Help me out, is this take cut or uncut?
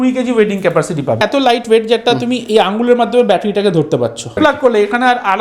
cut